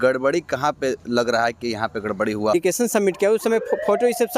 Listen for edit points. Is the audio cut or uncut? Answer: cut